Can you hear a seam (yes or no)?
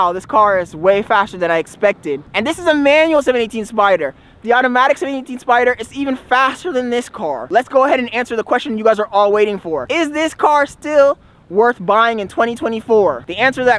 yes